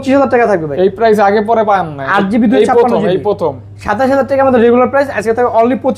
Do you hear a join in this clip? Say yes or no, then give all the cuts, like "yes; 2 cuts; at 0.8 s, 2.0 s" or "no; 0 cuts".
no; 0 cuts